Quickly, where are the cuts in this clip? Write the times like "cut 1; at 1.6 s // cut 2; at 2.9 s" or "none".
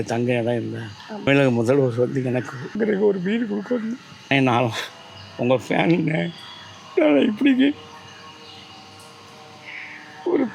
cut 1; at 1.3 s // cut 2; at 2.7 s // cut 3; at 4.1 s